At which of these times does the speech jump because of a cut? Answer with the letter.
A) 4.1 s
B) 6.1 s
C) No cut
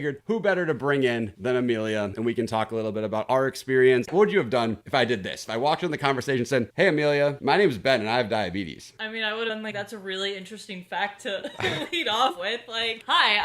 A